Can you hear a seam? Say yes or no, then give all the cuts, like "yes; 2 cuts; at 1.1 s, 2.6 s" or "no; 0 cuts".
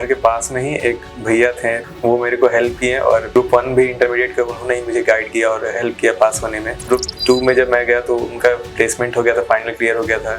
yes; 3 cuts; at 1.8 s, 3.3 s, 6.8 s